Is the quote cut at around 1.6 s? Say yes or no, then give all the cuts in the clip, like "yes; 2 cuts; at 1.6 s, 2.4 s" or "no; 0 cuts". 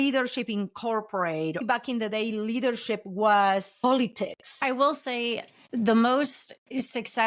yes; 2 cuts; at 1.6 s, 4.5 s